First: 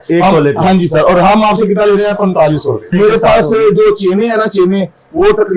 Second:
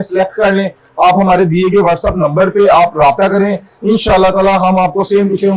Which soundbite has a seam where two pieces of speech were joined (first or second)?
first